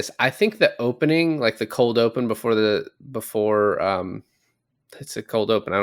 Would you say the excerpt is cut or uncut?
uncut